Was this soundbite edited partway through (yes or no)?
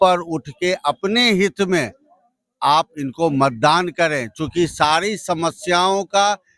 no